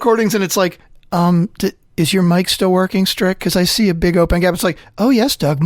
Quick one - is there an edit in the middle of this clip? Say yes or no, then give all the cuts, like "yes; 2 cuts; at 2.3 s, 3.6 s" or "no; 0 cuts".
no; 0 cuts